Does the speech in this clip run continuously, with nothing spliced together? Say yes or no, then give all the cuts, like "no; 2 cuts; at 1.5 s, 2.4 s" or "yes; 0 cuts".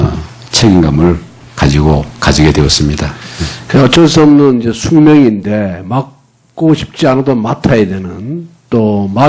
no; 1 cut; at 2.7 s